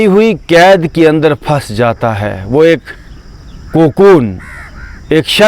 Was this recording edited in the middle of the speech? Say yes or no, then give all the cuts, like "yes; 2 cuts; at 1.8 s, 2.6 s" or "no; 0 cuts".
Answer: no; 0 cuts